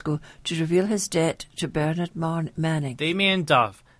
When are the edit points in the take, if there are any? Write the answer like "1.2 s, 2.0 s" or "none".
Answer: 2.9 s